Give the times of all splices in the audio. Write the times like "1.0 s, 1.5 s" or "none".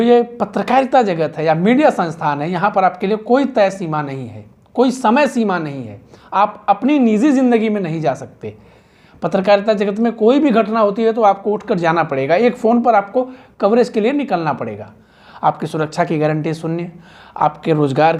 none